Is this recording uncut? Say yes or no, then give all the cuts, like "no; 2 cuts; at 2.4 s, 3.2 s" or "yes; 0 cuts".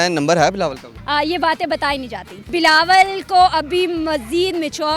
no; 2 cuts; at 0.9 s, 2.5 s